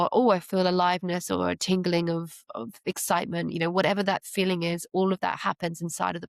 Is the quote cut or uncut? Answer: uncut